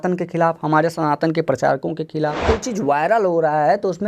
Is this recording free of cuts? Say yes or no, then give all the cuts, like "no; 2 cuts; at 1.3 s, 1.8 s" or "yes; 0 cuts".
no; 1 cut; at 2.4 s